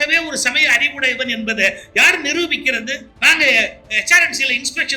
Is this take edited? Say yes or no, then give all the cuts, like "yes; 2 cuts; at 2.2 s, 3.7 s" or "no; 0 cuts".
yes; 1 cut; at 3.1 s